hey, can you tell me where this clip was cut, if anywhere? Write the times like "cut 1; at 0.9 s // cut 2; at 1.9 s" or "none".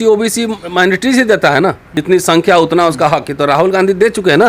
cut 1; at 1.9 s

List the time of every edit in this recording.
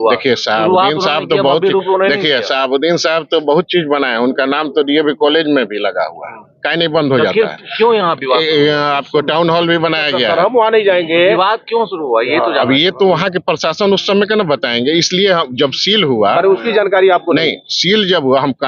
none

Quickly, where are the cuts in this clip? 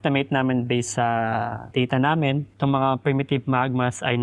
cut 1; at 1.6 s // cut 2; at 2.5 s

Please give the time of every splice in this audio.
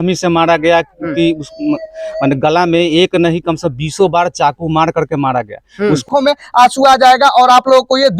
cut 1; at 6.0 s

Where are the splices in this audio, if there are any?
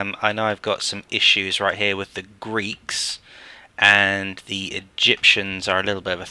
none

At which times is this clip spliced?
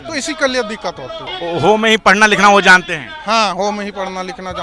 cut 1; at 1.3 s

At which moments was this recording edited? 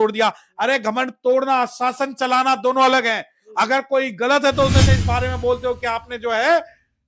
cut 1; at 4.9 s

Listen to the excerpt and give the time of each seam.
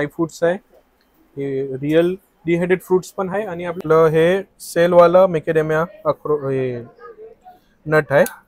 cut 1; at 3.8 s

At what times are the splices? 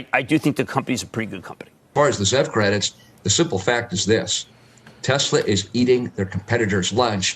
cut 1; at 1.9 s

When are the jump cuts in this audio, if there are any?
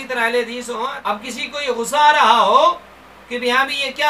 cut 1; at 1.0 s

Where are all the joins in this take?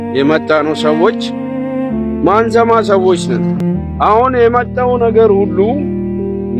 cut 1; at 3.6 s

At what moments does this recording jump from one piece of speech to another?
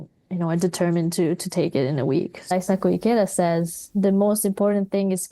cut 1; at 2.5 s

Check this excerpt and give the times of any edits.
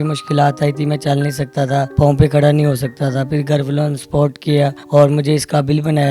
cut 1; at 1.9 s // cut 2; at 4.8 s

